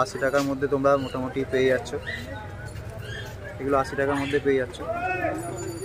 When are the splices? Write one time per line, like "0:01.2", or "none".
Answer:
none